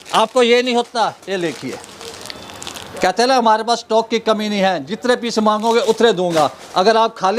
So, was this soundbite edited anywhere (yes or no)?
no